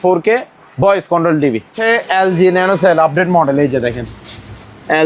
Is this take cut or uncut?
cut